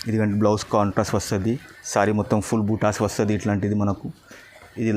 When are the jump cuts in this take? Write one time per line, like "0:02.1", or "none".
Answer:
none